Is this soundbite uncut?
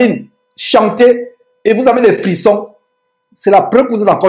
yes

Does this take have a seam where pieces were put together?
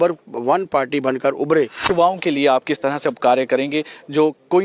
yes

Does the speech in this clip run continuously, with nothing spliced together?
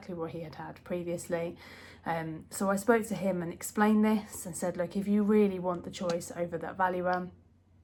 yes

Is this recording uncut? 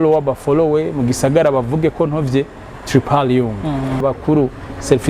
no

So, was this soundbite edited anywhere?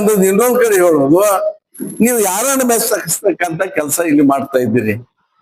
no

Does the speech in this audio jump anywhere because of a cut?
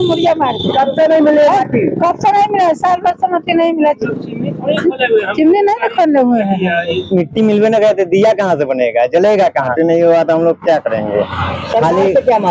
yes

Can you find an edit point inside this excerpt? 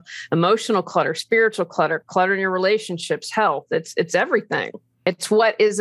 yes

